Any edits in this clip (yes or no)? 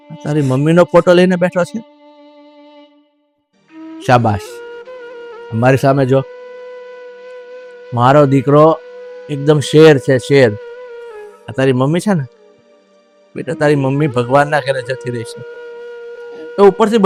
no